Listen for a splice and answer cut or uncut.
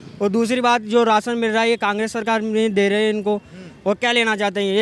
uncut